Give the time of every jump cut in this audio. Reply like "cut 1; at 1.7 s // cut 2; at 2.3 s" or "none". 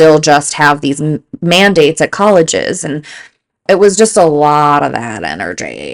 none